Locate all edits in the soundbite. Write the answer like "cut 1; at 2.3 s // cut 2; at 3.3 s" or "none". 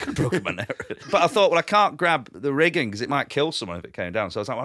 cut 1; at 1.0 s // cut 2; at 2.3 s // cut 3; at 3.3 s